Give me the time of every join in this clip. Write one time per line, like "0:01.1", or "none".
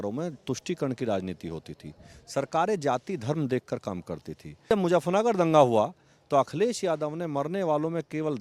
0:04.7

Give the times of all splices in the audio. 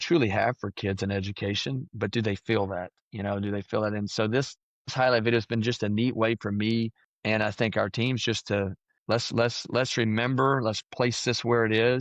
0:07.1
0:08.9

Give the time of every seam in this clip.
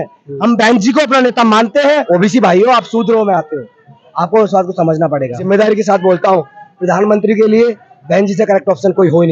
0:02.0
0:05.4

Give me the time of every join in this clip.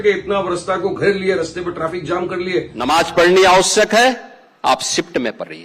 0:02.7

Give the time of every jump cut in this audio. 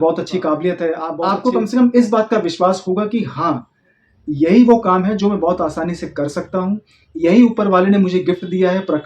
0:01.1

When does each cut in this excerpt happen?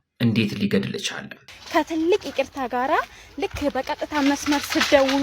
0:01.6

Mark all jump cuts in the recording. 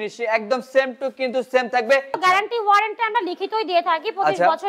0:02.2

